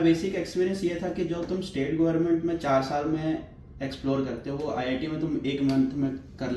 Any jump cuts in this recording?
no; 0 cuts

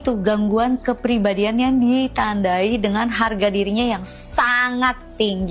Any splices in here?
no; 0 cuts

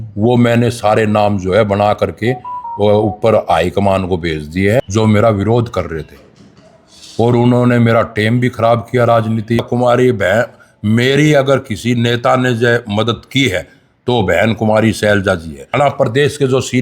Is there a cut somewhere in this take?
yes; 3 cuts; at 4.8 s, 9.6 s, 15.7 s

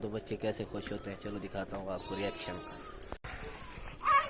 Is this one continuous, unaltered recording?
no; 1 cut; at 3.3 s

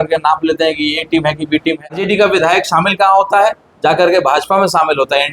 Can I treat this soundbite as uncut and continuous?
no; 1 cut; at 2.0 s

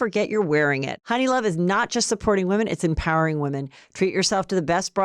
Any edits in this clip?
yes; 1 cut; at 0.9 s

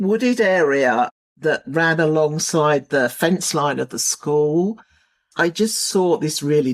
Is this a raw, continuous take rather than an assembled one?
no; 1 cut; at 5.3 s

